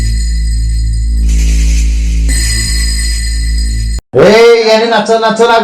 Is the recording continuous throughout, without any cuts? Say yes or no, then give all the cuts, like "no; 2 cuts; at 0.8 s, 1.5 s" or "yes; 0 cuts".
no; 1 cut; at 1.0 s